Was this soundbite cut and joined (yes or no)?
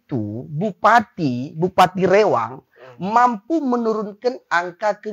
no